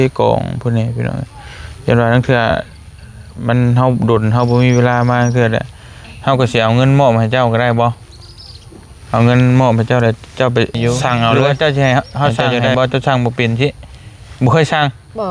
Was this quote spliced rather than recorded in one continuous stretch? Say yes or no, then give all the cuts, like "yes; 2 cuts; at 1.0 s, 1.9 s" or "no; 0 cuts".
yes; 1 cut; at 11.3 s